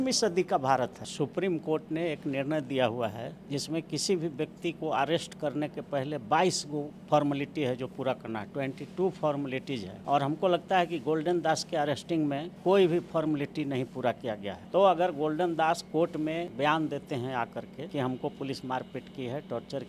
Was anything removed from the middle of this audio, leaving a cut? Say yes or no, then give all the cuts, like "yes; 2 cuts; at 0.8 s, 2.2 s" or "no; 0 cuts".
yes; 8 cuts; at 1.0 s, 3.4 s, 6.9 s, 9.9 s, 12.5 s, 14.5 s, 16.5 s, 17.9 s